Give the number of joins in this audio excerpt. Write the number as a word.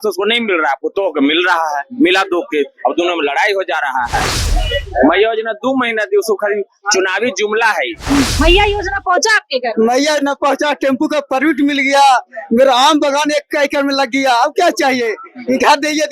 one